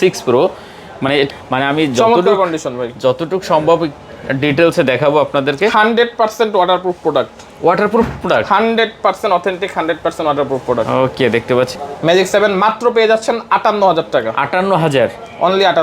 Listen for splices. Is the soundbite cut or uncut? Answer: cut